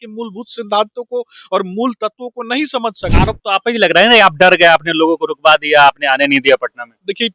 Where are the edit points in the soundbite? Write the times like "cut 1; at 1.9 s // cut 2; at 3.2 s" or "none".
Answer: cut 1; at 3.1 s